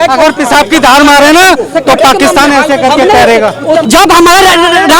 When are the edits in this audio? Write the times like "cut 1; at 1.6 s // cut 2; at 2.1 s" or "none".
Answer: cut 1; at 3.9 s